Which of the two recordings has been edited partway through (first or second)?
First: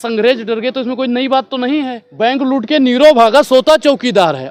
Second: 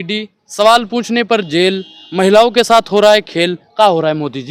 first